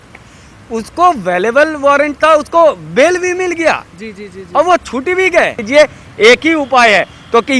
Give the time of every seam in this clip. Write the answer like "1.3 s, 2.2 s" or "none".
5.6 s